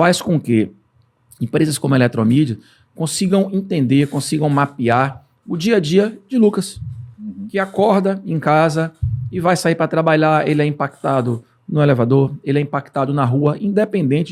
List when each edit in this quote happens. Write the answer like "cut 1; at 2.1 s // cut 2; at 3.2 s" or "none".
none